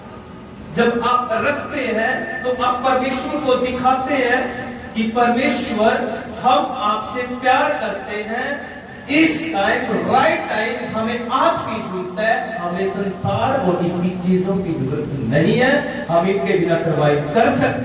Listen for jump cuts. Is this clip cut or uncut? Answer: uncut